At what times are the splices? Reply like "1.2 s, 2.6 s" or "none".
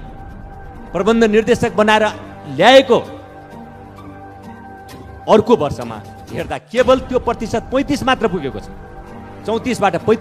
none